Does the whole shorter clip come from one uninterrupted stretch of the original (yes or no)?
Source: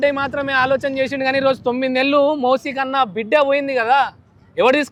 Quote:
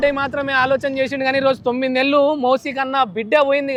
yes